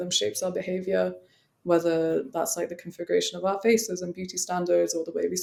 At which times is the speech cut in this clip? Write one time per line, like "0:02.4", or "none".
none